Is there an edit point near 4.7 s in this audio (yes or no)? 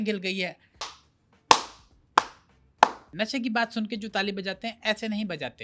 no